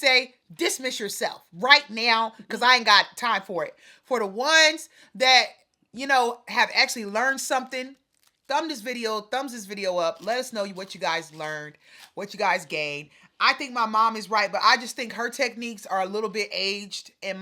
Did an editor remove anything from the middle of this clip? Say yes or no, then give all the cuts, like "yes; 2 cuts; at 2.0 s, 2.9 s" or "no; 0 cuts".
no; 0 cuts